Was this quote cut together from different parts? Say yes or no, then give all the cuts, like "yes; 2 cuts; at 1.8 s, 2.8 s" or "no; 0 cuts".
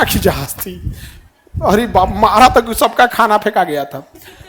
no; 0 cuts